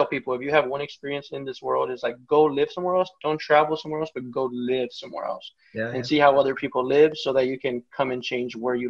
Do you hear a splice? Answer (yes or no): no